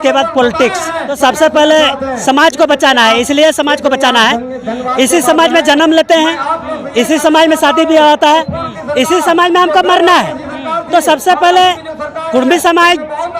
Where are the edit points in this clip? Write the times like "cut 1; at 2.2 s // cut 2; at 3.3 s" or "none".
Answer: cut 1; at 1.1 s